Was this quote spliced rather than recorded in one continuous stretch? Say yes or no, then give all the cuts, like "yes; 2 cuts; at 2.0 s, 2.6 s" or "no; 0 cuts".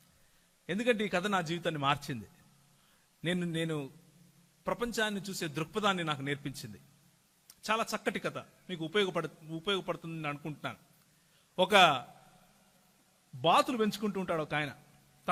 no; 0 cuts